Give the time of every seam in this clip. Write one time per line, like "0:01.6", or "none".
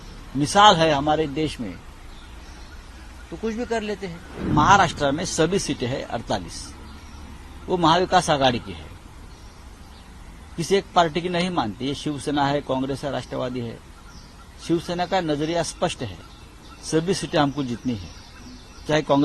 0:04.4